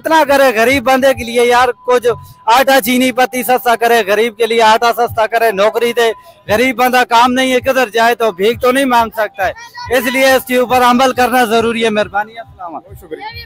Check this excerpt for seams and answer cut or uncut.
uncut